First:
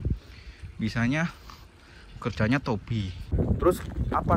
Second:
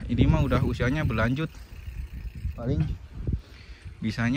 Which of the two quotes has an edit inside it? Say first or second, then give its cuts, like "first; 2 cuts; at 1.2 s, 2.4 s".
first; 1 cut; at 3.3 s